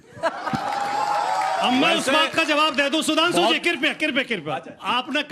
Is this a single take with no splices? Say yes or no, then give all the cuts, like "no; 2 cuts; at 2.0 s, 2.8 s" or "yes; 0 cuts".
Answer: yes; 0 cuts